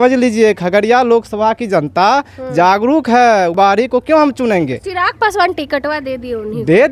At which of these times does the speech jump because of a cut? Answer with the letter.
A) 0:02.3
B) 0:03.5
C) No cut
B